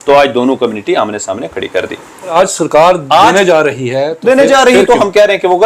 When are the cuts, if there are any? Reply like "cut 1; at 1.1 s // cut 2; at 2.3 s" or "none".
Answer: cut 1; at 2.3 s